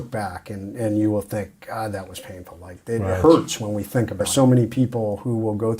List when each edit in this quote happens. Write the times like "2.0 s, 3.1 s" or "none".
4.3 s